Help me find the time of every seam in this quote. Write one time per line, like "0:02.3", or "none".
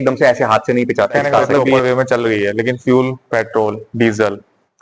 0:01.7